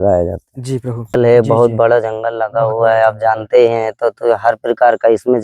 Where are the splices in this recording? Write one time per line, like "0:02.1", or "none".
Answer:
0:01.2